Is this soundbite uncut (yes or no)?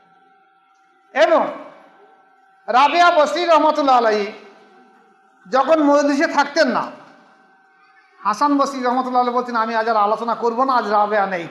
yes